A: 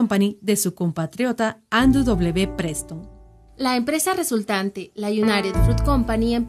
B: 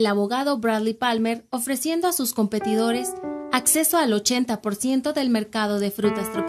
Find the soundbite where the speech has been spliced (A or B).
A